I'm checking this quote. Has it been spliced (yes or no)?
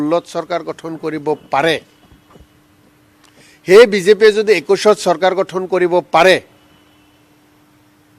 no